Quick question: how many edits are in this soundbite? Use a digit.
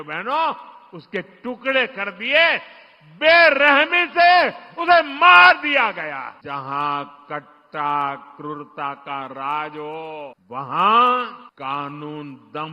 3